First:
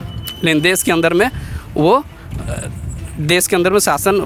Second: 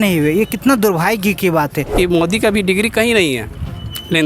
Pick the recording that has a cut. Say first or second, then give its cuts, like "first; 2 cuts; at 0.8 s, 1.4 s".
second; 1 cut; at 1.9 s